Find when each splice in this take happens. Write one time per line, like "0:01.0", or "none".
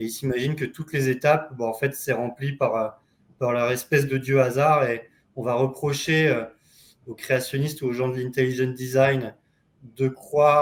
none